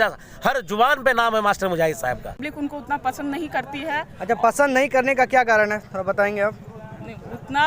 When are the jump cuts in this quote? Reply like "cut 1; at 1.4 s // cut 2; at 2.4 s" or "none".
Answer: cut 1; at 2.5 s